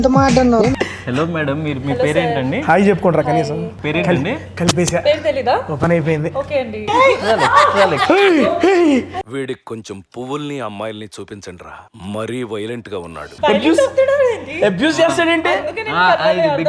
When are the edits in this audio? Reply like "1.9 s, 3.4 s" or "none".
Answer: 6.8 s